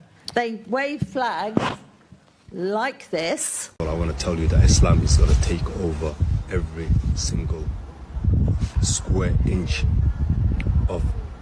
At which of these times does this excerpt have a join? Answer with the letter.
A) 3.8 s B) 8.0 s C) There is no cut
A